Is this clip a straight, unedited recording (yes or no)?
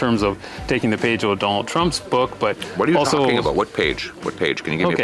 no